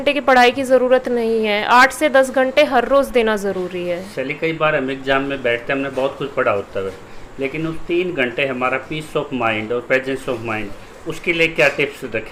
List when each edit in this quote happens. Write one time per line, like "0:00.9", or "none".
none